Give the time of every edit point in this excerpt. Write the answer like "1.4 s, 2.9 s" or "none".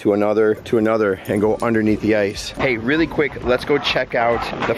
2.5 s